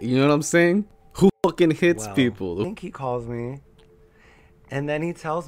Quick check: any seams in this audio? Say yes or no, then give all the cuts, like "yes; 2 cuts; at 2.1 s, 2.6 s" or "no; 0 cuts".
yes; 2 cuts; at 1.0 s, 2.6 s